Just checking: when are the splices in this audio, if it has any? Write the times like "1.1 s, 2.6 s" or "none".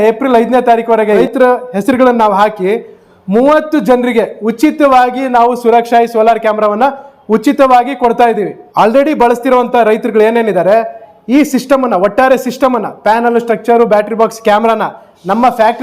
1.2 s, 8.6 s